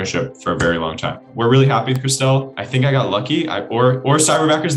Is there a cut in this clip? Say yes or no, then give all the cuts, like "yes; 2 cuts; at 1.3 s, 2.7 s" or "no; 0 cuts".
yes; 2 cuts; at 1.3 s, 2.6 s